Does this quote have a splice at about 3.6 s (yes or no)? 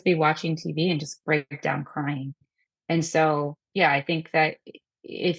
yes